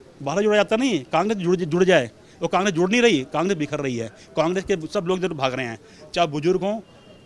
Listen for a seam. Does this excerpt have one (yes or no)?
no